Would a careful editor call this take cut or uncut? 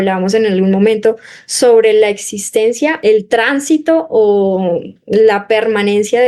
cut